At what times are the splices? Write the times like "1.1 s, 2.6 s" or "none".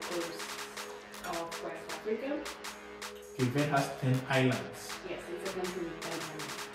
none

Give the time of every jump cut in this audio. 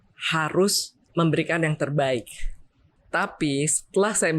0.9 s, 2.9 s

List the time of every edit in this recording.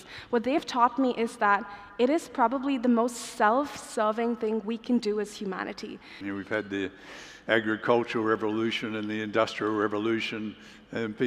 6.2 s

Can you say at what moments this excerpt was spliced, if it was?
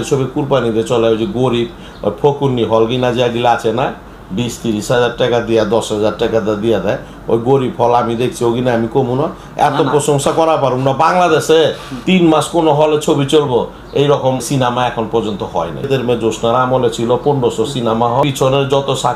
14.5 s, 15.9 s, 18.2 s

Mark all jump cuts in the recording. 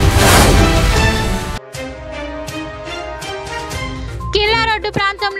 4.3 s

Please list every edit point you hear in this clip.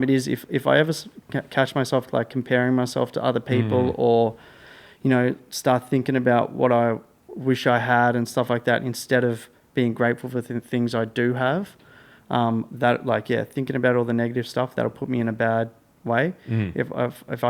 none

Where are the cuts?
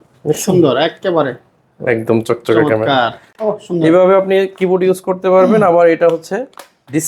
3.3 s

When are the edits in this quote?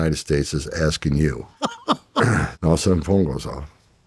1.5 s, 2.5 s

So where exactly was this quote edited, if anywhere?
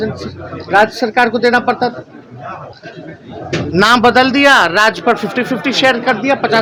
none

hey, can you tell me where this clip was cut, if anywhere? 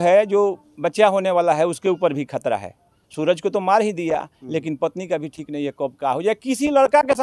none

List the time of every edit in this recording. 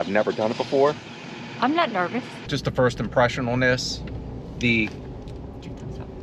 2.5 s

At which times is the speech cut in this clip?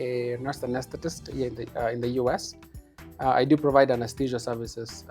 none

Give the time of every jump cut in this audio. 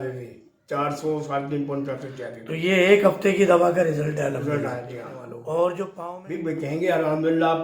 6.0 s

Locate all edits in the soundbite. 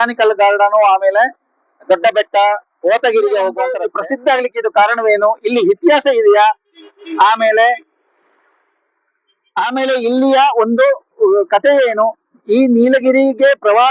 3.9 s

